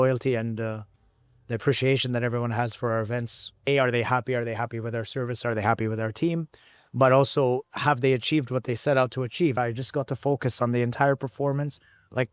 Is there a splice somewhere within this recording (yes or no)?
yes